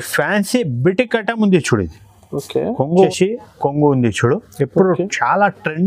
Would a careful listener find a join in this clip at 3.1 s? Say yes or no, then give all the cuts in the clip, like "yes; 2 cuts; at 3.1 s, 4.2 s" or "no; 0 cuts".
yes; 1 cut; at 3.1 s